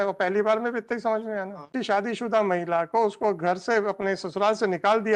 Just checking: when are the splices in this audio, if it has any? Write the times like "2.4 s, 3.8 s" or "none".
1.7 s

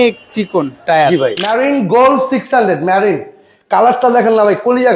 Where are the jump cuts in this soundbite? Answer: 1.4 s

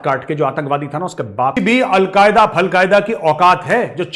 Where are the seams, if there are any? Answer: 1.6 s

